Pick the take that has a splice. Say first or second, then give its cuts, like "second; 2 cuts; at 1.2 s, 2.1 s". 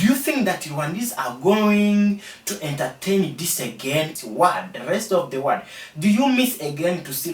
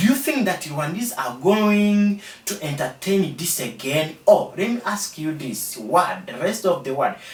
first; 1 cut; at 4.1 s